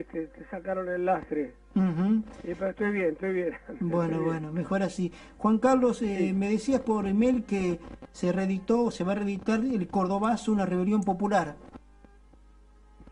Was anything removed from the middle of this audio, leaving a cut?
no; 0 cuts

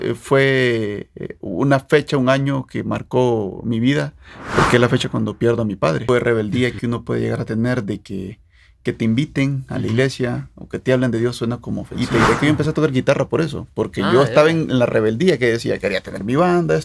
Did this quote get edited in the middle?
yes; 2 cuts; at 6.0 s, 12.0 s

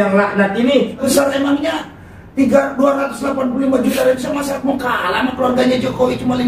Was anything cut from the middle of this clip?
yes; 1 cut; at 1.0 s

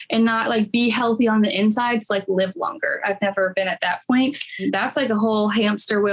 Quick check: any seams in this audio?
no; 0 cuts

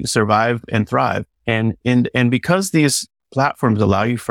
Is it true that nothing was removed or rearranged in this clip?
yes; 0 cuts

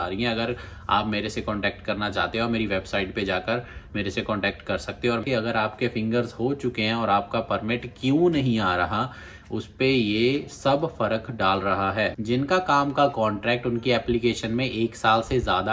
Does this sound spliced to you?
yes; 2 cuts; at 5.2 s, 12.3 s

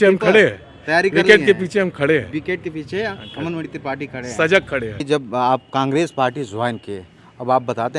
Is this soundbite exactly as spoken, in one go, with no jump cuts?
no; 1 cut; at 5.0 s

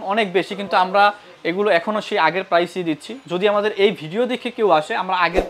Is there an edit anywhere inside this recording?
no; 0 cuts

